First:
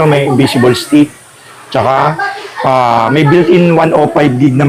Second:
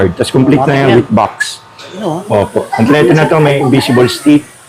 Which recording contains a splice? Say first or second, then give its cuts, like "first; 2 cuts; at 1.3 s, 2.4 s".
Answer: second; 1 cut; at 2.0 s